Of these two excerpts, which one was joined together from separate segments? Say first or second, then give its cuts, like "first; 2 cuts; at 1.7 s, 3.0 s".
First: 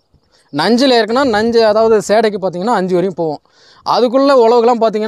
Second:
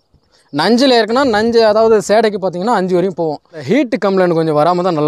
second; 1 cut; at 3.6 s